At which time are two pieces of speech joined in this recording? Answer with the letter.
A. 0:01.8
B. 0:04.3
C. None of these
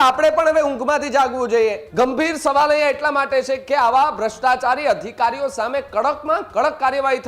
A